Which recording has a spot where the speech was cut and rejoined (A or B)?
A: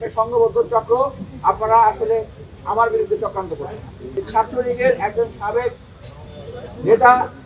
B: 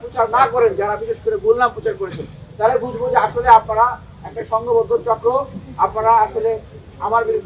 A